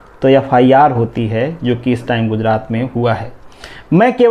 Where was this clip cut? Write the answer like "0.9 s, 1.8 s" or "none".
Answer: none